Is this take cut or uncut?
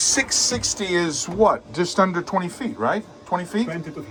uncut